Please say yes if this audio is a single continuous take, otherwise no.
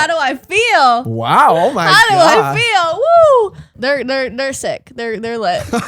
no